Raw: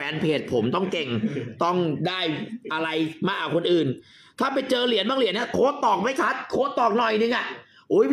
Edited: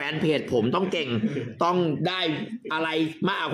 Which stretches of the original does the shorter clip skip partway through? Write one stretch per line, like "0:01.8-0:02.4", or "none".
none